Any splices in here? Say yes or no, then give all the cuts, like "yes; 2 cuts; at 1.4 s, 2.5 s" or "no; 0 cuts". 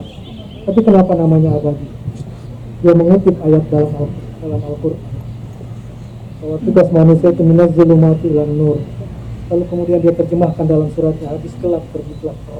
no; 0 cuts